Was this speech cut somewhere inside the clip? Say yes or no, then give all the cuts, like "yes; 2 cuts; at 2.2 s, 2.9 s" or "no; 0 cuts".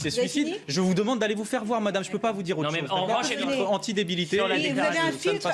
yes; 1 cut; at 3.3 s